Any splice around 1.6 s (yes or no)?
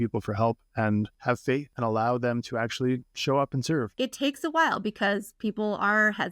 yes